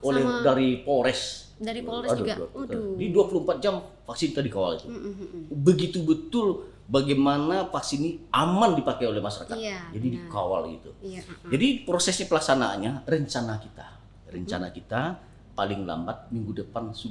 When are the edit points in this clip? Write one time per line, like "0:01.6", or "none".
none